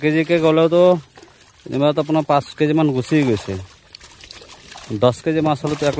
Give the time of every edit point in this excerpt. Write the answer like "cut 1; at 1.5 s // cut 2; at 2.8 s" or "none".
none